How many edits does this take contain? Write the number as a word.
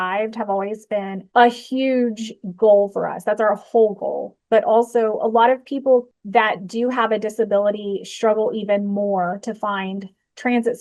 one